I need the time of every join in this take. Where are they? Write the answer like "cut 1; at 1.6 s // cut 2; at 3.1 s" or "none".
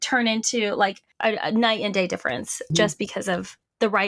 cut 1; at 1.1 s // cut 2; at 2.7 s